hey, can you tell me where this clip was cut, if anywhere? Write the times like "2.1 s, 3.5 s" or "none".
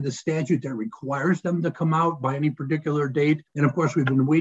3.5 s